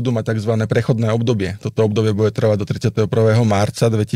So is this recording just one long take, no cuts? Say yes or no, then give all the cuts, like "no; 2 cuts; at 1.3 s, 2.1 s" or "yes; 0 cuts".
yes; 0 cuts